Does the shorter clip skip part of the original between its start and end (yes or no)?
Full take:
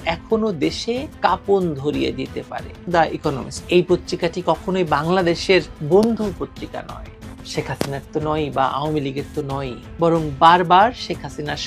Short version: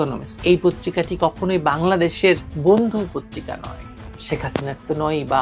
no